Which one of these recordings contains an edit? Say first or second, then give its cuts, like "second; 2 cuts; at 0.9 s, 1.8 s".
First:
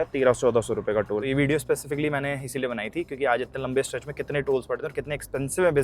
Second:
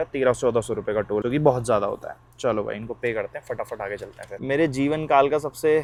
first; 1 cut; at 1.2 s